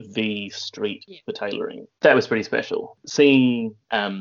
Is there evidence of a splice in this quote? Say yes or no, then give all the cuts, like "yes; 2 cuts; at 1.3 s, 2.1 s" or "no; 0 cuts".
yes; 2 cuts; at 1.8 s, 2.9 s